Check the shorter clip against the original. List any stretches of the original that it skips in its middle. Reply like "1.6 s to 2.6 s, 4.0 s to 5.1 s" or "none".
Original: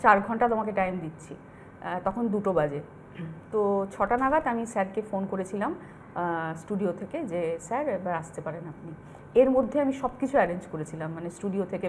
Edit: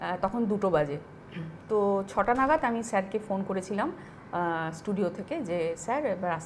none